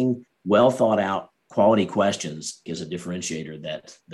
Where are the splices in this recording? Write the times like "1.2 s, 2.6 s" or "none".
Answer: 2.6 s